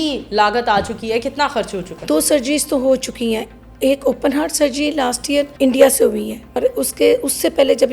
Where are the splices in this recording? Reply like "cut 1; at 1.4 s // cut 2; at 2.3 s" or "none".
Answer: cut 1; at 2.0 s // cut 2; at 5.5 s // cut 3; at 6.6 s